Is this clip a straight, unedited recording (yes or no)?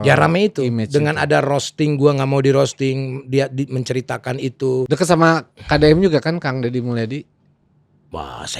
no